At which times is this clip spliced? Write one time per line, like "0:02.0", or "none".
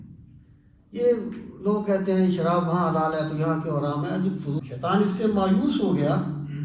0:04.6

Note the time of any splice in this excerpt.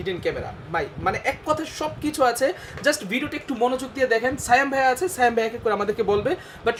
none

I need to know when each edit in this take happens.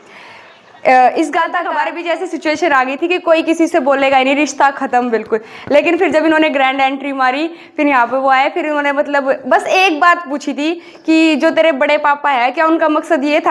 0:01.6

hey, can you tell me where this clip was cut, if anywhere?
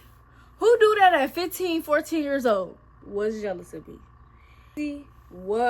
0:03.0
0:04.7

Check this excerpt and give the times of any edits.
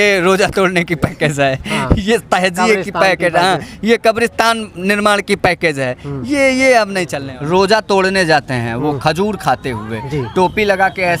0:07.2

